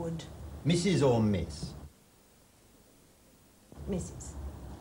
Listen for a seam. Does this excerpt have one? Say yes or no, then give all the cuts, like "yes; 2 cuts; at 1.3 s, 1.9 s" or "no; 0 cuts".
no; 0 cuts